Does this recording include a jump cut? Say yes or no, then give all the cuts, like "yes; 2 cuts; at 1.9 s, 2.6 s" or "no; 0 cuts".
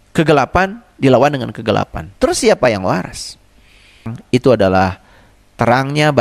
yes; 1 cut; at 4.2 s